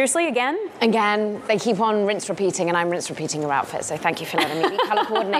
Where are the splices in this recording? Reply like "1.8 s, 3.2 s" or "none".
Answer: none